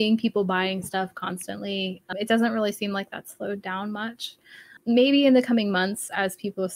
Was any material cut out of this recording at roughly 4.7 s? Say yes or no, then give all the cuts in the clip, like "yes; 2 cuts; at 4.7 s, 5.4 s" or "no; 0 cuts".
yes; 2 cuts; at 2.1 s, 4.7 s